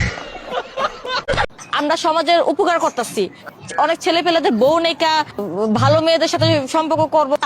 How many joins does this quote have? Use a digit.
1